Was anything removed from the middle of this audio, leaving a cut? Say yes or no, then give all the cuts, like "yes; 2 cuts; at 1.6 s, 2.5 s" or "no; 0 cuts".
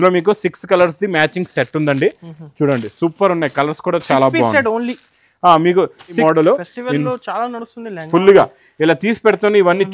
yes; 1 cut; at 6.2 s